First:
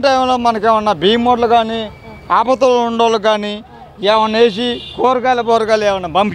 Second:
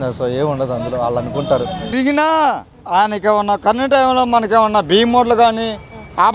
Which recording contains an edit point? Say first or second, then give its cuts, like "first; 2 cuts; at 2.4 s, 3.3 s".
second; 1 cut; at 1.8 s